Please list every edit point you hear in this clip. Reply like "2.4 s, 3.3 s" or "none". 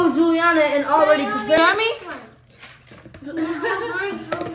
1.6 s